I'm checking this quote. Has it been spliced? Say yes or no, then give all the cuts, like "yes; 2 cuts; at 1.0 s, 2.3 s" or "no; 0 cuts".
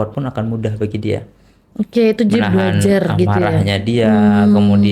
no; 0 cuts